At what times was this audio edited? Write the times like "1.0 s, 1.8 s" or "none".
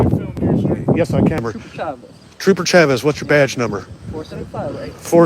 1.4 s